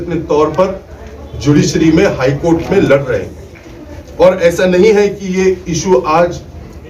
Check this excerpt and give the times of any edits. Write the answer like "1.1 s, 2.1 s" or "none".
none